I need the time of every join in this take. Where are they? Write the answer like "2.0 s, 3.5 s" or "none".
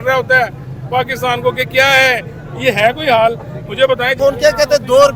4.2 s